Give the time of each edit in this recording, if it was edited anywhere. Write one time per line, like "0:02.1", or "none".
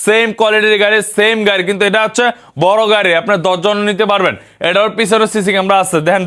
none